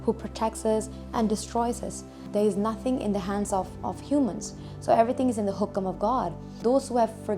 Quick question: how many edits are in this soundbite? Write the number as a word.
two